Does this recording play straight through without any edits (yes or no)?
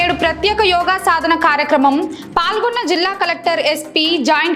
yes